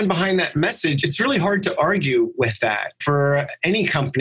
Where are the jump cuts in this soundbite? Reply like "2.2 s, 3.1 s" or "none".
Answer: 1.0 s, 3.0 s